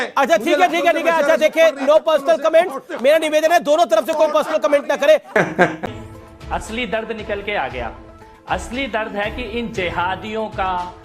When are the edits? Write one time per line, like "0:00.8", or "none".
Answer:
0:05.8